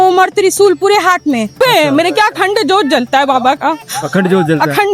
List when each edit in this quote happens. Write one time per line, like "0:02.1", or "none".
0:01.6